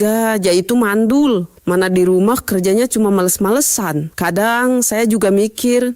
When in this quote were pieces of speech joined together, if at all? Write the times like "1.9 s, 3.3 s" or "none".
none